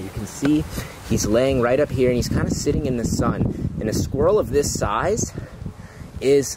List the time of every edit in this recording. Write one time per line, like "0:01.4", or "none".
none